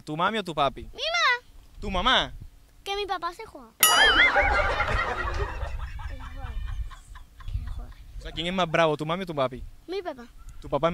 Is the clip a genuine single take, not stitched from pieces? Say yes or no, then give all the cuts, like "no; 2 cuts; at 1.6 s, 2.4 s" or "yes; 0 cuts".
yes; 0 cuts